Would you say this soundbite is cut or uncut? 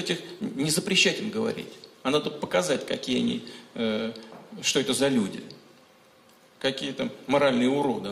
uncut